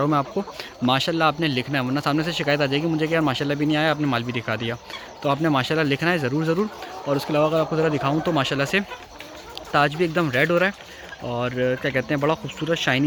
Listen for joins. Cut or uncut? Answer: uncut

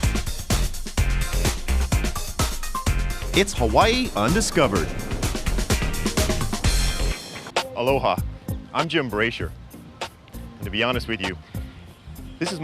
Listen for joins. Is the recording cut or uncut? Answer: cut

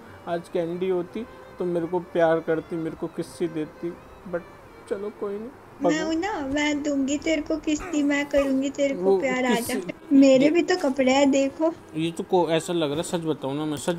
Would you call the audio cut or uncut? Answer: cut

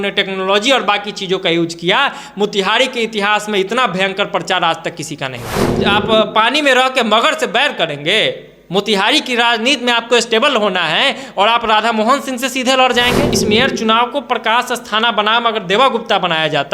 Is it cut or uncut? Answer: cut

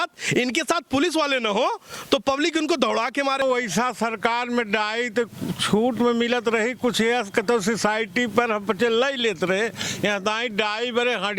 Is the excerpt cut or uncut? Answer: cut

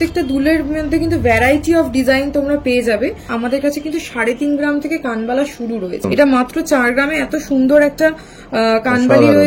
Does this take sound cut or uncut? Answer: cut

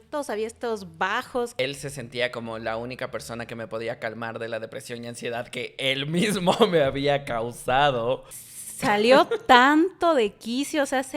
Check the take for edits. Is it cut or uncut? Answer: cut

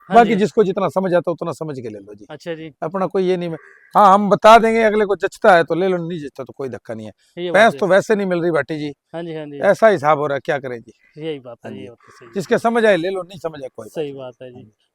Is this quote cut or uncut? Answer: uncut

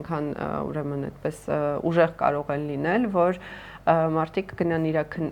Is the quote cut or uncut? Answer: uncut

